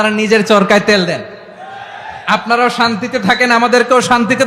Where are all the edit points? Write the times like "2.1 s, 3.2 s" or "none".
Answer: none